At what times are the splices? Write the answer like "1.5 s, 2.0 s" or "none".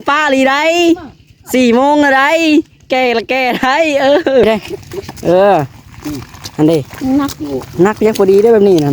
4.4 s